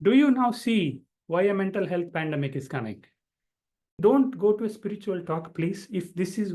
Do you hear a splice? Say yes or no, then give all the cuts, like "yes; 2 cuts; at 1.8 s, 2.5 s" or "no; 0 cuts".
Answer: yes; 1 cut; at 4.0 s